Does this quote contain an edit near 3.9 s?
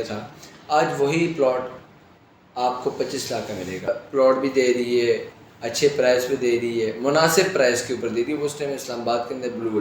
yes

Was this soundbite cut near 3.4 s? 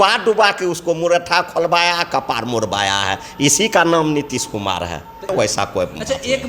no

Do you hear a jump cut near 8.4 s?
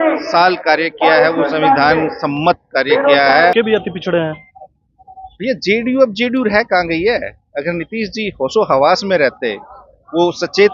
no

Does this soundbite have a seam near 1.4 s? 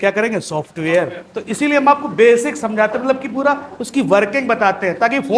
yes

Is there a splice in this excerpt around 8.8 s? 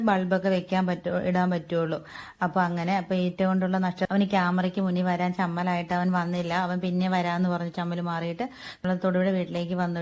yes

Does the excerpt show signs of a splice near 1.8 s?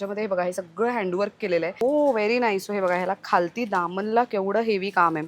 yes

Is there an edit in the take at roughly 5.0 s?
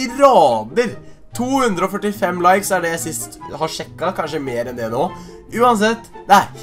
no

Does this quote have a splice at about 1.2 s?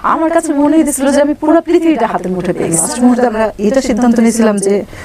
no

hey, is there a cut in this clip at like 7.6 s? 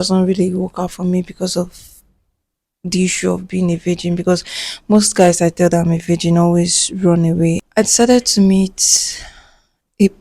yes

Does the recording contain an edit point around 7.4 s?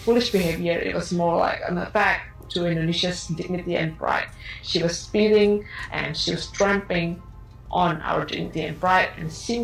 no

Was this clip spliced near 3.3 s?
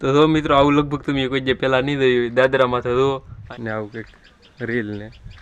yes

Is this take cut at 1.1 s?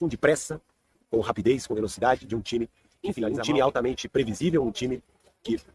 no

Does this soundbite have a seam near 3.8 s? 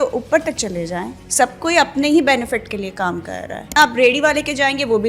yes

